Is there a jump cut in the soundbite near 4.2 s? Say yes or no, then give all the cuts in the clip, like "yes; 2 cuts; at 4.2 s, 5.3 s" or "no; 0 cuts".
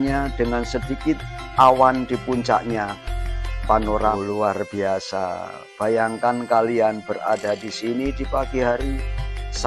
yes; 1 cut; at 4.2 s